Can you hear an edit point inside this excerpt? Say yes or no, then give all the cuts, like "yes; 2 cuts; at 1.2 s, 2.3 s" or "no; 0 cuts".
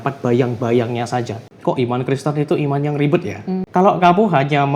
yes; 2 cuts; at 1.4 s, 3.6 s